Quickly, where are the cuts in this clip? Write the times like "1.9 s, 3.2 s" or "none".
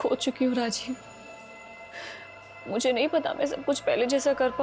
none